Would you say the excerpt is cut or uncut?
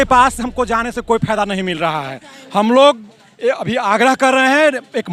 uncut